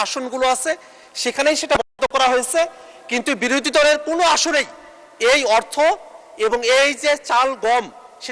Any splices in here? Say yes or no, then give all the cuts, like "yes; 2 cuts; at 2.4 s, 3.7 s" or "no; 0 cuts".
no; 0 cuts